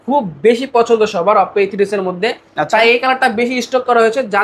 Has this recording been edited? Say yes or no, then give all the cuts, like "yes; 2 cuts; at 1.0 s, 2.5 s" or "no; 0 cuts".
no; 0 cuts